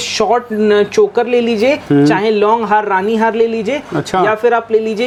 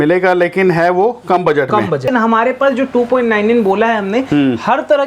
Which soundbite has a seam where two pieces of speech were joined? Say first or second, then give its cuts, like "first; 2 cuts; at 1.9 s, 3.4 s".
second; 1 cut; at 2.0 s